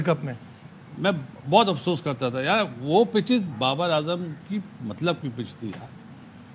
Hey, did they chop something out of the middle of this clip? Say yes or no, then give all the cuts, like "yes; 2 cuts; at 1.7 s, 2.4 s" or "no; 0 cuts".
no; 0 cuts